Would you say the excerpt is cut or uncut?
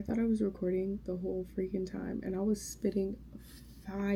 uncut